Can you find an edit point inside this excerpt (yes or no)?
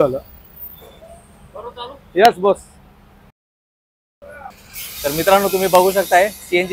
no